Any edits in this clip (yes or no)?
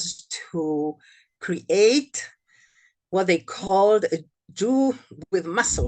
no